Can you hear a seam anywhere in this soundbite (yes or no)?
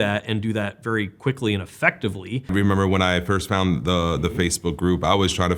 yes